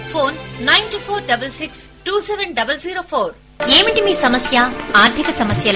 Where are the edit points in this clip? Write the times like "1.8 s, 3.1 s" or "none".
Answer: 3.4 s